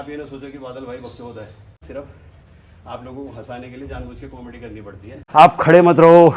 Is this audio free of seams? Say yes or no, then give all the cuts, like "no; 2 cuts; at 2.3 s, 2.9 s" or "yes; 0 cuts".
no; 2 cuts; at 1.8 s, 5.2 s